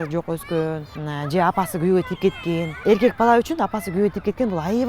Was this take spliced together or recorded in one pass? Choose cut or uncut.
cut